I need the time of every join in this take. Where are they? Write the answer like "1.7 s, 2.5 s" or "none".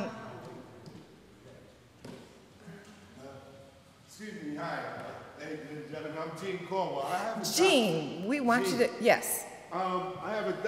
7.5 s